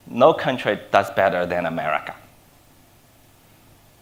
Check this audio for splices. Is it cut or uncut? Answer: uncut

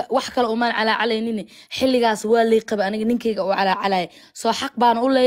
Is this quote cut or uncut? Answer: uncut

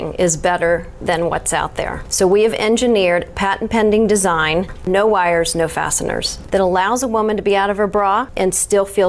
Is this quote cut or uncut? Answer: cut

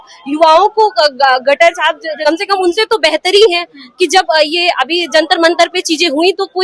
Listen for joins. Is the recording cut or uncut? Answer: cut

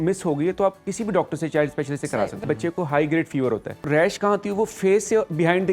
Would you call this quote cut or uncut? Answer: cut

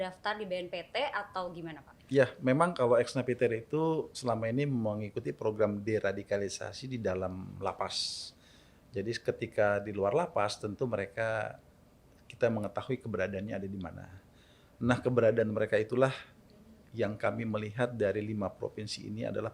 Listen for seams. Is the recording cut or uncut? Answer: uncut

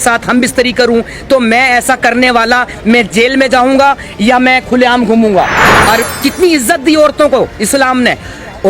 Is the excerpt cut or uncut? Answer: cut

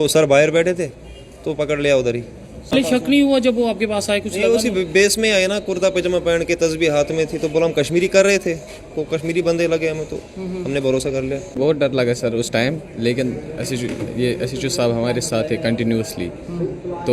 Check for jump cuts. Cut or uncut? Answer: cut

